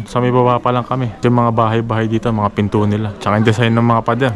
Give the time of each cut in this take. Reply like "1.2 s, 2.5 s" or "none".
1.1 s